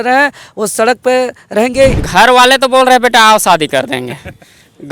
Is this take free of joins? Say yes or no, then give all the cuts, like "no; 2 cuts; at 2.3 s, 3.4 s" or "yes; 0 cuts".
no; 1 cut; at 2.0 s